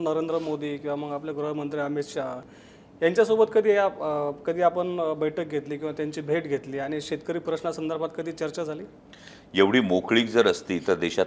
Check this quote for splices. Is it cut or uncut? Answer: cut